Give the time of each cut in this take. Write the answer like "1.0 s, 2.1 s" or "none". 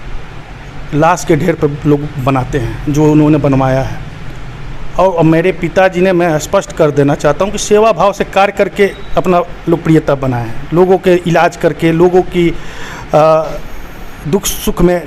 none